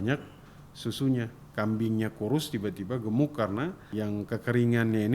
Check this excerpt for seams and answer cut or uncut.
cut